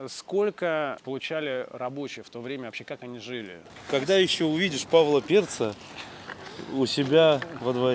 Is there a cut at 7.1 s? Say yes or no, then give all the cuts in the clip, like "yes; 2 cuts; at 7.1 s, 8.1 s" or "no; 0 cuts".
no; 2 cuts; at 1.0 s, 3.7 s